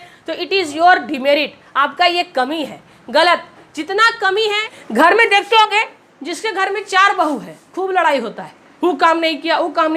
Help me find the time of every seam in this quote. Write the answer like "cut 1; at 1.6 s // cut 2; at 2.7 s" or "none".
cut 1; at 4.7 s